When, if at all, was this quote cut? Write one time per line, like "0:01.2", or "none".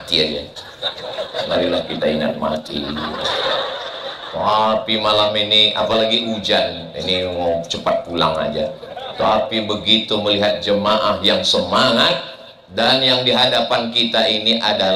none